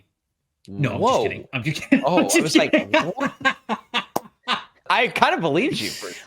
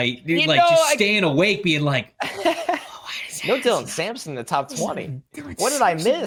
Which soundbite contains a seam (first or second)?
first